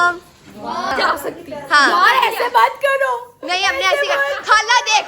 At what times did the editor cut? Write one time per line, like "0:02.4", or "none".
0:00.9